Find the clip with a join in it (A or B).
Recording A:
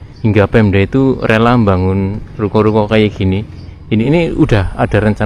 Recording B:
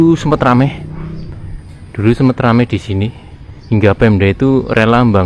A